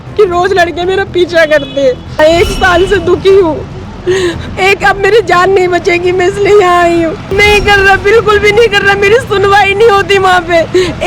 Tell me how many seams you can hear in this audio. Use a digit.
2